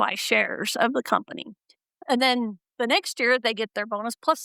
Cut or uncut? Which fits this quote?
uncut